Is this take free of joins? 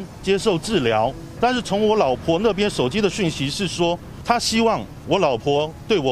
no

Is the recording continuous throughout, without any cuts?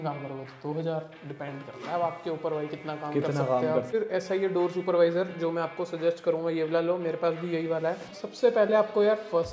no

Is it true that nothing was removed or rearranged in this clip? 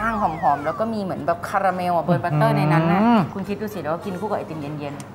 yes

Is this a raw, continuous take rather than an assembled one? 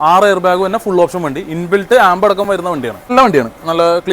no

